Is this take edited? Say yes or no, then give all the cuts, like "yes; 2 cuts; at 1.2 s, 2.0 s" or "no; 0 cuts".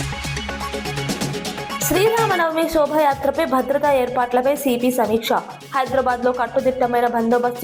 yes; 1 cut; at 1.8 s